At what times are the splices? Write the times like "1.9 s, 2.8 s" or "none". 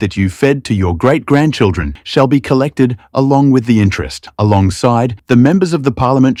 none